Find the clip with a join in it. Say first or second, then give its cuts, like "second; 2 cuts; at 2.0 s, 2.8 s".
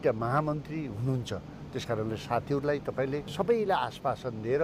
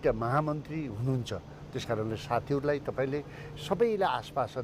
first; 1 cut; at 3.2 s